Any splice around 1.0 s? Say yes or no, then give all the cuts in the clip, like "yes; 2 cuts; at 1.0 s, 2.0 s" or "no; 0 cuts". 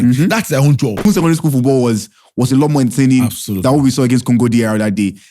yes; 1 cut; at 1.0 s